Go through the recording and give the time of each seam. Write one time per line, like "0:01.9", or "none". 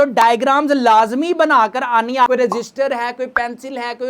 0:02.3

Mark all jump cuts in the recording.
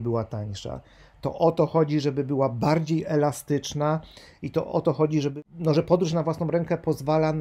0:05.3

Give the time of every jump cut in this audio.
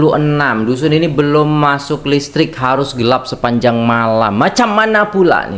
none

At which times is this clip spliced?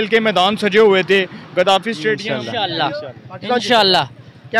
0:02.2

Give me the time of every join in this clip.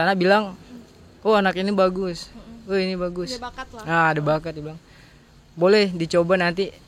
none

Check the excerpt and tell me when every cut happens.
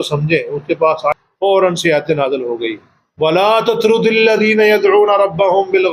0:01.1

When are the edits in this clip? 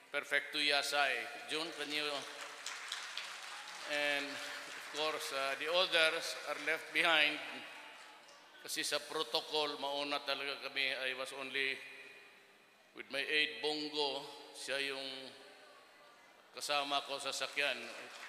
0:11.1

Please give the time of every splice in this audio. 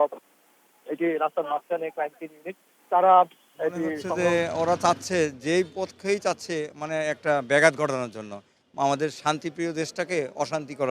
0:04.0

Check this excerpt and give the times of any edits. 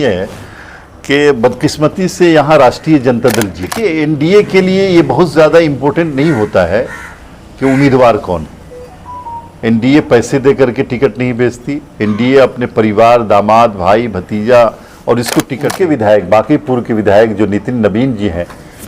0:03.8
0:15.6

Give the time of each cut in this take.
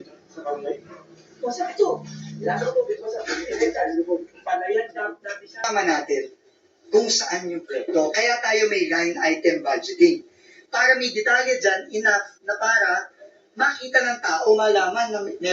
0:05.7

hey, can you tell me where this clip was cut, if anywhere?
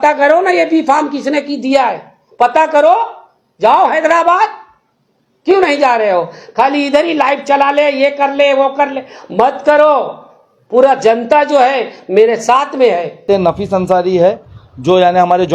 0:13.2

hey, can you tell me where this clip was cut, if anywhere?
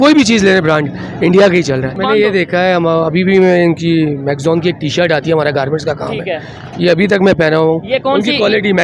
0:01.9

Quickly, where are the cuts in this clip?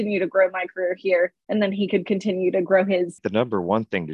0:03.2

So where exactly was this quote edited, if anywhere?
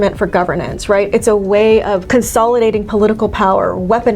0:02.0

